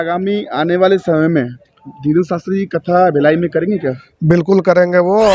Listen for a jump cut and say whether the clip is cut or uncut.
uncut